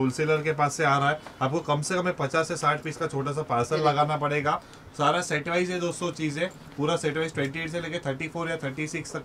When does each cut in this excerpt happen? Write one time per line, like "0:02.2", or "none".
none